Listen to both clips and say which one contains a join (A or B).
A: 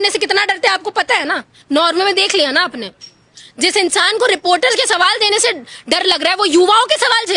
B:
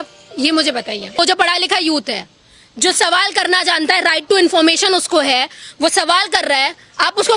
B